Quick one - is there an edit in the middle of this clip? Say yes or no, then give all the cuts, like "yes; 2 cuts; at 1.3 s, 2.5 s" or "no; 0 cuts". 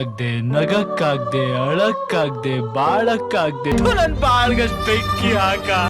no; 0 cuts